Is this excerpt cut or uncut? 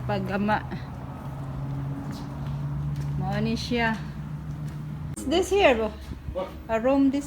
cut